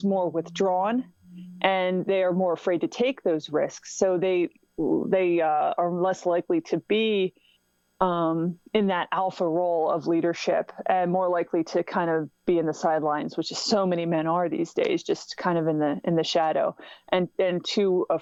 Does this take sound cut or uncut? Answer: uncut